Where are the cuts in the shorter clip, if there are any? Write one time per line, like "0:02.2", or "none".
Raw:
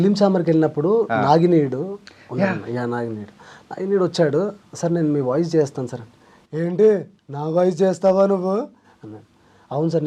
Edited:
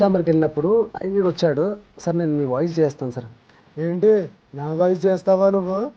0:00.9